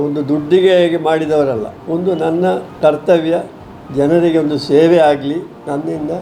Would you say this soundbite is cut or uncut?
uncut